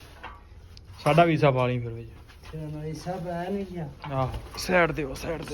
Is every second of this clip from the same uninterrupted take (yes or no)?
no